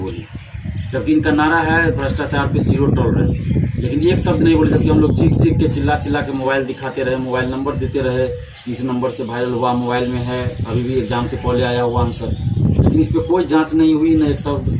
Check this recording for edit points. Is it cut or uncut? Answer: uncut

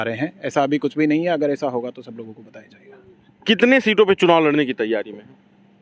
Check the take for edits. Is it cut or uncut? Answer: uncut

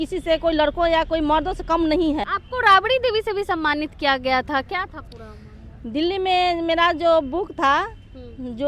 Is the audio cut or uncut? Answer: cut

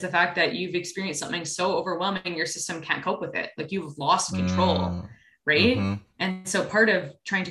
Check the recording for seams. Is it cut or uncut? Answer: uncut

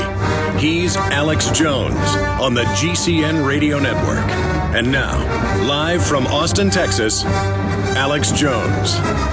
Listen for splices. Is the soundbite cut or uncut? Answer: uncut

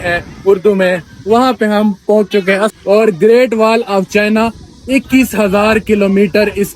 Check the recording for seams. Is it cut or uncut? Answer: cut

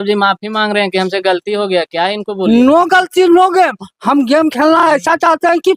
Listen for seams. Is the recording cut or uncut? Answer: uncut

